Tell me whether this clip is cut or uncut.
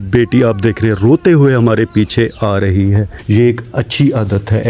cut